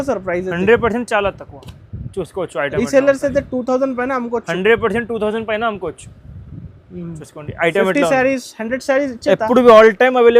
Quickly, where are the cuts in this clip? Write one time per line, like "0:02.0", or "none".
none